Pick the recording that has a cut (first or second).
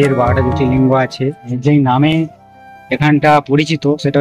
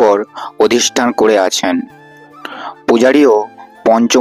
first